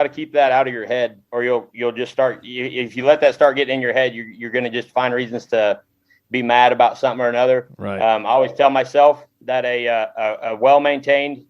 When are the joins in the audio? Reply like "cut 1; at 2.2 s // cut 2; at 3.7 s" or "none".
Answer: cut 1; at 1.2 s